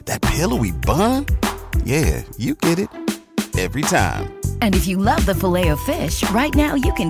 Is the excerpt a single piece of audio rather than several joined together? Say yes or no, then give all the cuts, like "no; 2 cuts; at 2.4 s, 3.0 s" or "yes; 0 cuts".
yes; 0 cuts